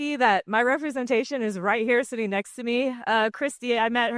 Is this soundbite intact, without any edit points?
yes; 0 cuts

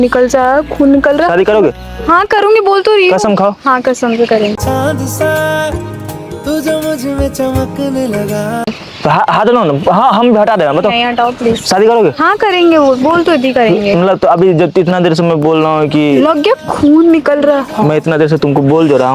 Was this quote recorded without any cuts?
yes; 0 cuts

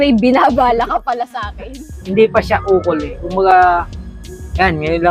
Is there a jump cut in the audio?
yes; 1 cut; at 1.8 s

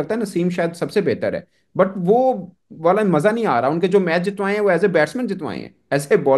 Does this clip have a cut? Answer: no; 0 cuts

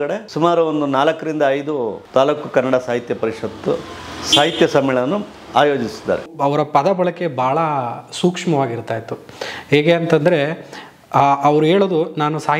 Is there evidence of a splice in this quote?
yes; 1 cut; at 6.3 s

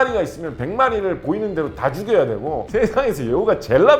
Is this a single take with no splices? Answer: no; 1 cut; at 2.6 s

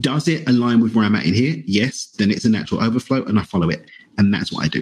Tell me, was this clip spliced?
no; 0 cuts

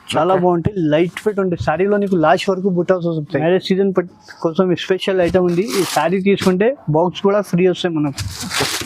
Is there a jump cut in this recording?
yes; 1 cut; at 3.4 s

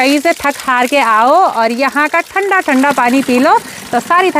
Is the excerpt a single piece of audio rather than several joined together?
yes; 0 cuts

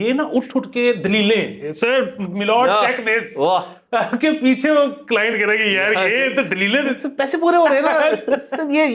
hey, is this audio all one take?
yes; 0 cuts

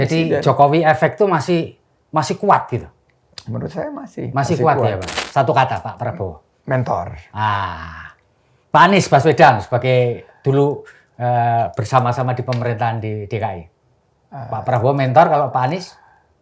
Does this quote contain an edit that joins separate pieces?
yes; 1 cut; at 5.1 s

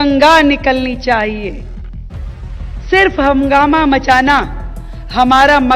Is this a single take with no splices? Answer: yes; 0 cuts

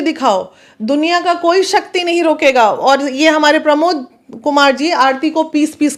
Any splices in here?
no; 0 cuts

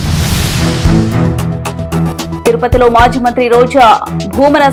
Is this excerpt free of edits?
yes; 0 cuts

